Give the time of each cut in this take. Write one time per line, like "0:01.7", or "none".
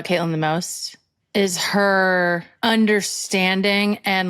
0:02.5